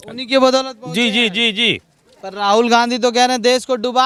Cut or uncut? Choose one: uncut